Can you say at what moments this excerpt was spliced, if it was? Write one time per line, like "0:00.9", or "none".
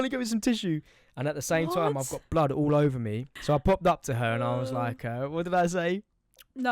0:03.3